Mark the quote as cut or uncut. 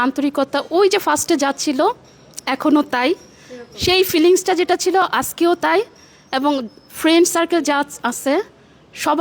uncut